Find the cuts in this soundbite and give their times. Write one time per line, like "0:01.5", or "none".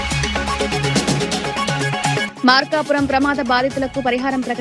0:02.2